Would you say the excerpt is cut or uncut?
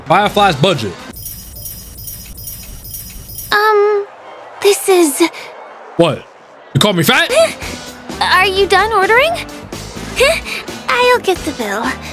uncut